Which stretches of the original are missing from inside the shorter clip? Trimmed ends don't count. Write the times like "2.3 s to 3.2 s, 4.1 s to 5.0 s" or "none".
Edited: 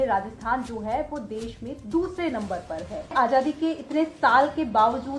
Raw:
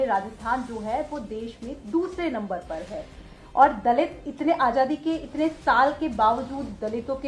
3.1 s to 4.6 s